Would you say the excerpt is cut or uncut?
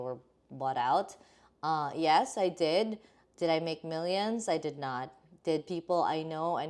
uncut